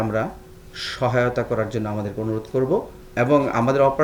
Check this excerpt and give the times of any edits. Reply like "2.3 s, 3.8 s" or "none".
3.0 s